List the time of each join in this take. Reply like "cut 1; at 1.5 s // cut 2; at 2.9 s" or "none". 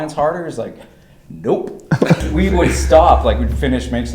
cut 1; at 2.2 s